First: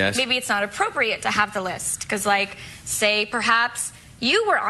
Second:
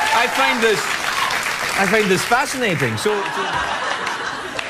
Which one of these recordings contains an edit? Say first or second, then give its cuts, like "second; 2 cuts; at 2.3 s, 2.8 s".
second; 1 cut; at 1.5 s